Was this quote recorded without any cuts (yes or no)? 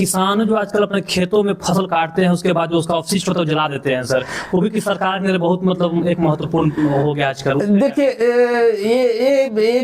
yes